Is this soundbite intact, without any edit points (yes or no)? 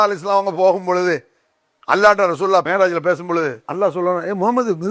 no